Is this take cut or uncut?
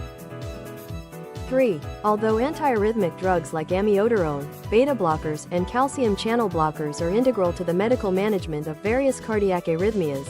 cut